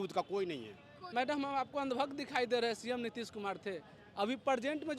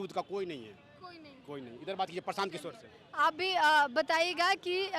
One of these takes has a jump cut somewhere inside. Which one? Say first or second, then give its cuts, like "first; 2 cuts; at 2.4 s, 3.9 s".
first; 1 cut; at 1.0 s